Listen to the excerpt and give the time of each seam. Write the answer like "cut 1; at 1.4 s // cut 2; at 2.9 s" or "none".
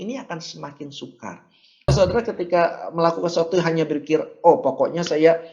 cut 1; at 1.9 s